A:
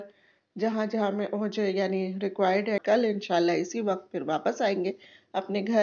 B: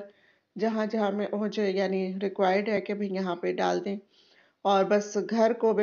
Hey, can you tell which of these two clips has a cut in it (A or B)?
A